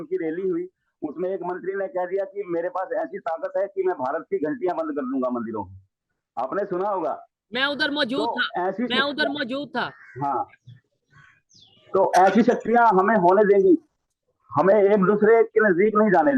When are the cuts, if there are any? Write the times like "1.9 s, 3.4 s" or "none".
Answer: none